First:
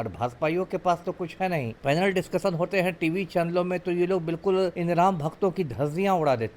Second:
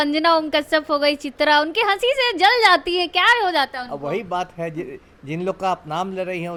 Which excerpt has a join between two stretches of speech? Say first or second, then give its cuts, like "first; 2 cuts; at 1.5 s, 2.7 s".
first; 2 cuts; at 1.7 s, 4.8 s